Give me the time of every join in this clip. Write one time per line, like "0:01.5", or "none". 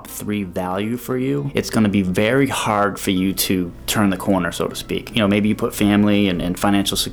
0:01.5
0:03.8
0:05.1